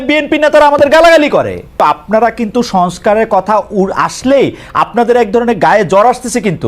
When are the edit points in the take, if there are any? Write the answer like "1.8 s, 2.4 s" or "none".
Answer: 1.8 s